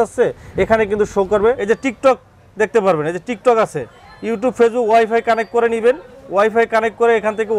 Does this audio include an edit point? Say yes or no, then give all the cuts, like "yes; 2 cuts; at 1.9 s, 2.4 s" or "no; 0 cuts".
yes; 1 cut; at 1.6 s